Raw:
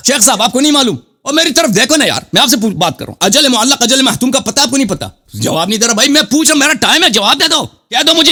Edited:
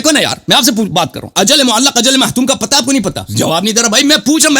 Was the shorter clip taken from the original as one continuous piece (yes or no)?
no